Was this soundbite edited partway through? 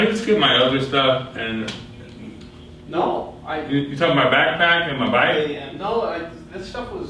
no; 0 cuts

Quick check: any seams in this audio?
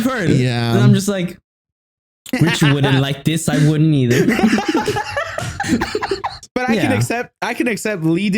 yes; 1 cut; at 6.4 s

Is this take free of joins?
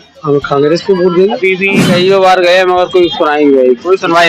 no; 1 cut; at 1.8 s

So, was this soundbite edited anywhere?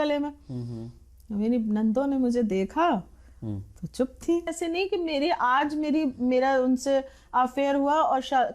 yes; 1 cut; at 4.5 s

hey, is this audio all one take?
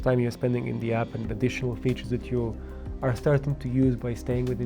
yes; 0 cuts

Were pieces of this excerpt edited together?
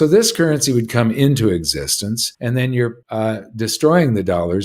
yes; 2 cuts; at 2.3 s, 3.0 s

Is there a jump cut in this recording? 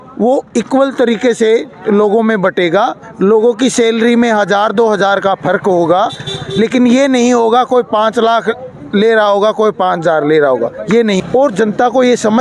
yes; 1 cut; at 11.2 s

